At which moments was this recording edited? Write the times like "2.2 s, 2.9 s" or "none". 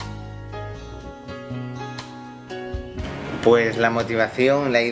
none